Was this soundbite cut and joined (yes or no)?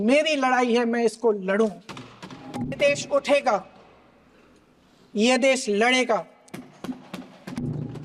yes